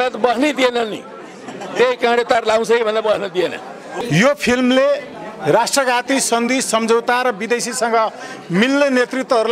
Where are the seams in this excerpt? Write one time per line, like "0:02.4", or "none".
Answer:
0:03.8